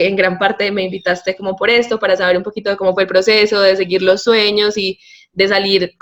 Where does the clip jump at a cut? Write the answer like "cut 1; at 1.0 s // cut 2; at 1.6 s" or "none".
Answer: none